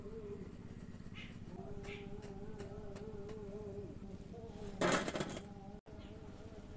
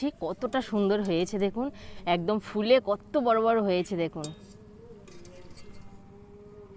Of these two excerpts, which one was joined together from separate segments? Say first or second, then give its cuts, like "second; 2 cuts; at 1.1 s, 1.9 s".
first; 2 cuts; at 1.6 s, 5.9 s